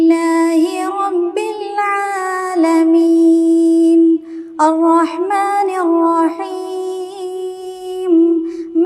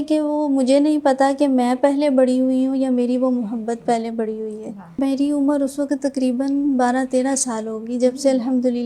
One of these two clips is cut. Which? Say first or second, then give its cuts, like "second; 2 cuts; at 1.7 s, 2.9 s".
second; 1 cut; at 5.0 s